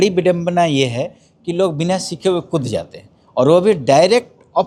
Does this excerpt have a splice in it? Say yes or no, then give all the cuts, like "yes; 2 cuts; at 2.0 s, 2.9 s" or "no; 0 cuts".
no; 0 cuts